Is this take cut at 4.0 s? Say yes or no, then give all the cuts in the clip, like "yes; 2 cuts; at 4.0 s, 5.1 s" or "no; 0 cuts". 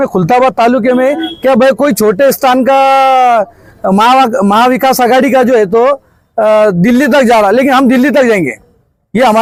no; 0 cuts